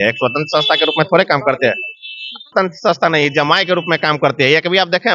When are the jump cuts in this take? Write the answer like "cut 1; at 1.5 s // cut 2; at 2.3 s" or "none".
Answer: cut 1; at 2.5 s